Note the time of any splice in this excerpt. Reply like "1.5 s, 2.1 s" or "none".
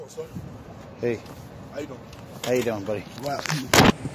none